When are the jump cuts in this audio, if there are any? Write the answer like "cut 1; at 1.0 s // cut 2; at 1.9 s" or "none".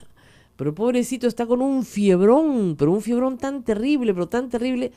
none